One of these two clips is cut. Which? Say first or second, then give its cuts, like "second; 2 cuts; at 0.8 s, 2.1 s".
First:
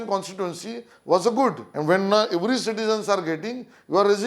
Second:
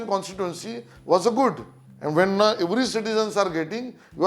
first; 1 cut; at 1.7 s